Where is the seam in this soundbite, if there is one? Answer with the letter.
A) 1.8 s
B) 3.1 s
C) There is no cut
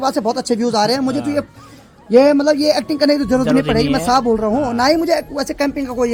C